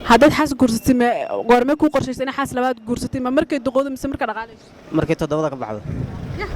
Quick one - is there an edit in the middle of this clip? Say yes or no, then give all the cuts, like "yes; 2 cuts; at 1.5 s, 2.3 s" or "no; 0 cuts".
no; 0 cuts